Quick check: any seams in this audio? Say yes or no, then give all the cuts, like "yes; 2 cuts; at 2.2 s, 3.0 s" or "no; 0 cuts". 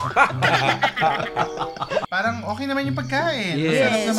yes; 1 cut; at 2.1 s